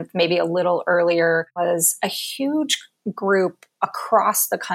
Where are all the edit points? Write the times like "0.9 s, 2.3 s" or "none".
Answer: 1.5 s